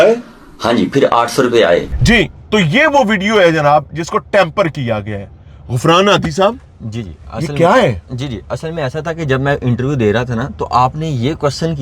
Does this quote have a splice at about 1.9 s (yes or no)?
no